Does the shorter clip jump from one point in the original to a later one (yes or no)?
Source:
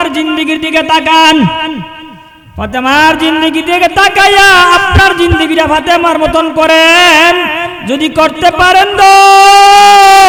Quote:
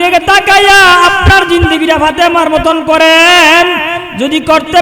no